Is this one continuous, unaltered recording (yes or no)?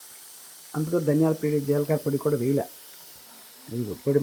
yes